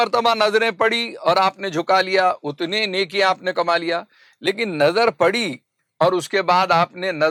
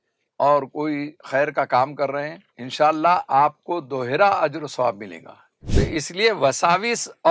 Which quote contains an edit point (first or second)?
second